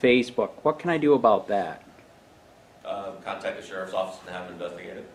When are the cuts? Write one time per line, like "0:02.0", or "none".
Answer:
none